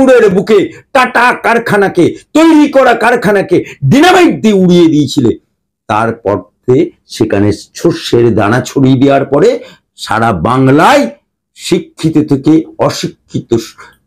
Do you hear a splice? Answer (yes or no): no